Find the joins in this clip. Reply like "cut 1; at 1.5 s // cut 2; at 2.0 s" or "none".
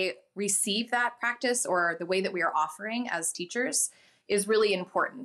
none